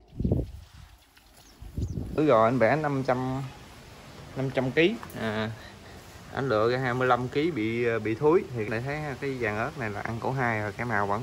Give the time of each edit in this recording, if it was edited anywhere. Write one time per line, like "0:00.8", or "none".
0:02.2
0:08.7